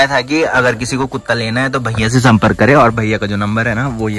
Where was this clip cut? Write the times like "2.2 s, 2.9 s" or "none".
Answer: none

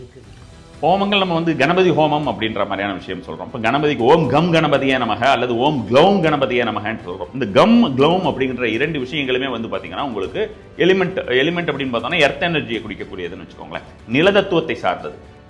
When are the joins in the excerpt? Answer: none

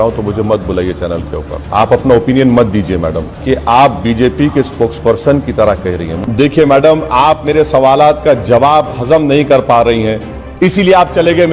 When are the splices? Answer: 1.6 s, 3.3 s, 6.1 s

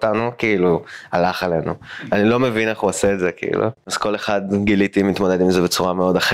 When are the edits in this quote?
4.2 s

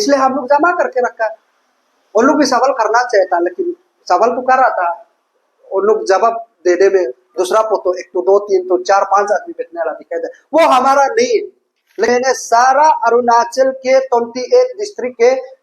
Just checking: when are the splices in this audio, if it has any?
12.1 s

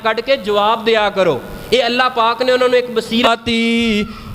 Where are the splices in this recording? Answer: 3.3 s

